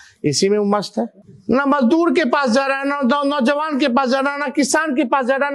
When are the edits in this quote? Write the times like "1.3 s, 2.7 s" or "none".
1.3 s